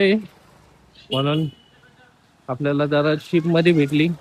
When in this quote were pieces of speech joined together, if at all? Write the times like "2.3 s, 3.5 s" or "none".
none